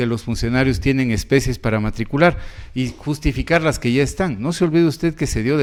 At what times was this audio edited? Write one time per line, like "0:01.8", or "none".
none